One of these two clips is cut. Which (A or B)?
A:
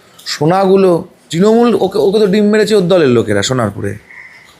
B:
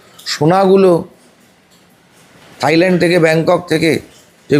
A